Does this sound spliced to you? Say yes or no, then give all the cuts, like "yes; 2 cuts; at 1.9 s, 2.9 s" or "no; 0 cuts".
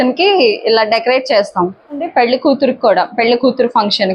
yes; 1 cut; at 2.1 s